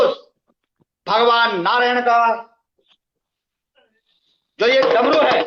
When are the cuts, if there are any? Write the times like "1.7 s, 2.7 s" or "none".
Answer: none